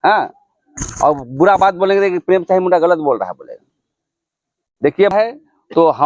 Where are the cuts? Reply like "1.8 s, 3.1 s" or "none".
5.1 s